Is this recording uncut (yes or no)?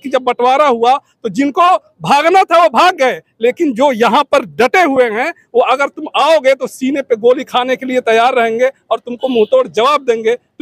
yes